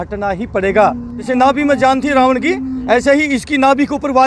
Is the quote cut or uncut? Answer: cut